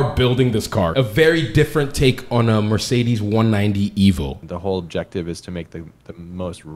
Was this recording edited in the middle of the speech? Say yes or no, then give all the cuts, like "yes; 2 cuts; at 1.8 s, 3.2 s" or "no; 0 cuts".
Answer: yes; 2 cuts; at 0.9 s, 4.4 s